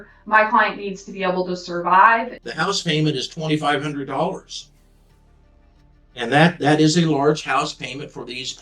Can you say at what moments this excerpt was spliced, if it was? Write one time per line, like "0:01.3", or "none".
0:02.4